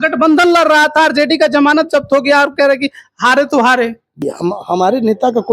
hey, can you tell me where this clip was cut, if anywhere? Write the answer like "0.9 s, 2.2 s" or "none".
4.2 s